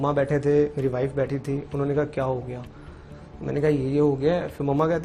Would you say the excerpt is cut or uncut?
uncut